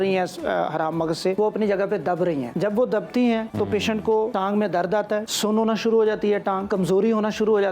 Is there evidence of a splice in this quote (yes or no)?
yes